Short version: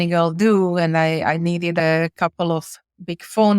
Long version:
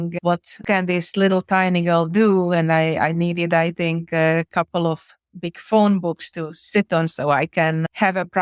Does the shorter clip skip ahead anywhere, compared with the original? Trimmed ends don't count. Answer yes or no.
yes